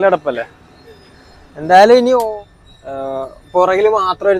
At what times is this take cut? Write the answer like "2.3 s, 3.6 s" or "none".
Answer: 2.3 s